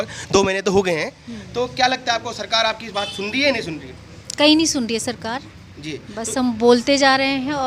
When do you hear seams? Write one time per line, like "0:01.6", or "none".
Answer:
none